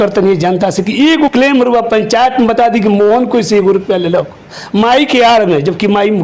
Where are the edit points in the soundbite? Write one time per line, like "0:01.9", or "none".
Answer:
0:01.3